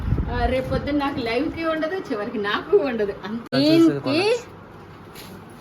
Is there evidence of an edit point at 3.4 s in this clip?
yes; 1 cut; at 3.4 s

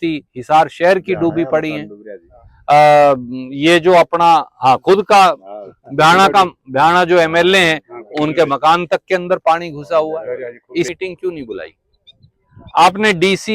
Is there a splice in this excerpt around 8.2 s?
no; 1 cut; at 10.9 s

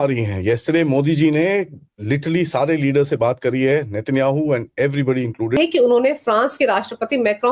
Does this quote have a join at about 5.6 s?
yes; 1 cut; at 5.6 s

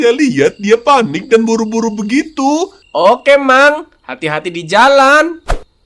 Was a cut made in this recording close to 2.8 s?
yes; 1 cut; at 2.8 s

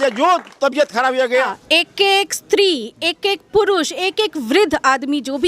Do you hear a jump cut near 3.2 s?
no; 1 cut; at 1.3 s

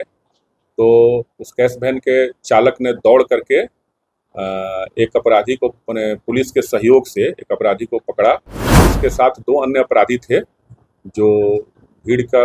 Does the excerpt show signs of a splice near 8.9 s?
yes; 1 cut; at 8.9 s

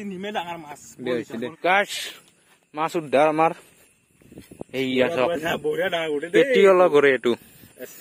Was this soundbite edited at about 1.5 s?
yes; 1 cut; at 1.5 s

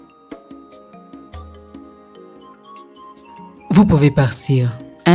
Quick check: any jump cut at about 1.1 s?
yes; 1 cut; at 1.1 s

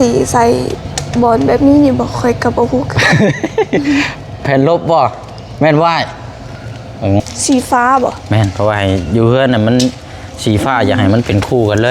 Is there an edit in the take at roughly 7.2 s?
yes; 1 cut; at 7.2 s

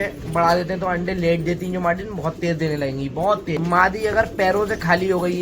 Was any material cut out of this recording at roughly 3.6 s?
yes; 1 cut; at 3.6 s

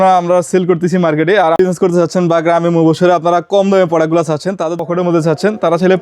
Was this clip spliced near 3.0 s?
no; 2 cuts; at 1.6 s, 4.7 s

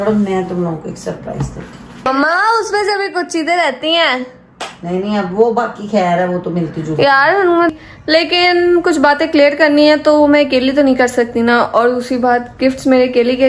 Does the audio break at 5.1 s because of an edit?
no; 2 cuts; at 2.0 s, 7.7 s

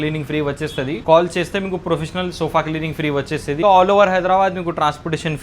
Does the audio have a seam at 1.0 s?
yes; 2 cuts; at 1.0 s, 3.6 s

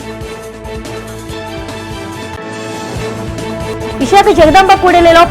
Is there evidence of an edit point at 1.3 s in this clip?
yes; 1 cut; at 1.3 s

